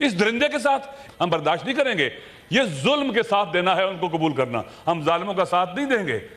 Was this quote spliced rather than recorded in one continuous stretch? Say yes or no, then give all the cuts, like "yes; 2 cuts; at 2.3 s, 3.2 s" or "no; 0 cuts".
yes; 1 cut; at 1.0 s